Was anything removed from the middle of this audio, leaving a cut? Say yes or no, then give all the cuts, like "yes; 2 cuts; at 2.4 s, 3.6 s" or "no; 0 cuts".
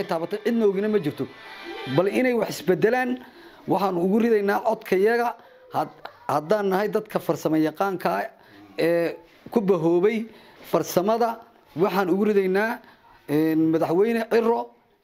no; 0 cuts